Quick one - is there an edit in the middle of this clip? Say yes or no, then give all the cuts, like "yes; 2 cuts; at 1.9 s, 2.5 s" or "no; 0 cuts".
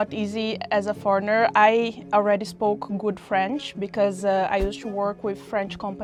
no; 0 cuts